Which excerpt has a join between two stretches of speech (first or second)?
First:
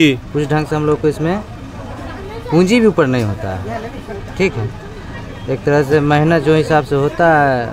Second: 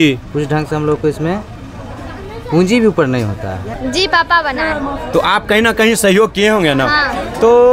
second